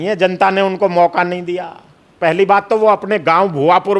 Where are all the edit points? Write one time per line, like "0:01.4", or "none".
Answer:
0:02.2